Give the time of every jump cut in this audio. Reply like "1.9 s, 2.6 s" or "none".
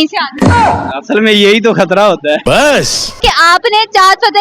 3.2 s